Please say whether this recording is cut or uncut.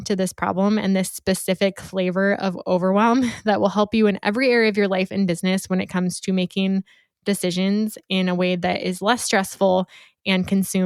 uncut